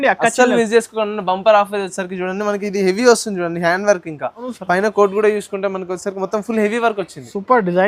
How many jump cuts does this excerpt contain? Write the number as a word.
one